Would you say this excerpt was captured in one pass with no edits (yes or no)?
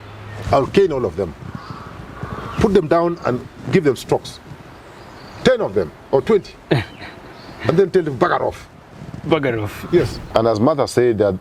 no